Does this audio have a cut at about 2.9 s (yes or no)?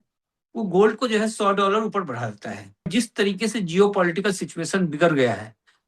yes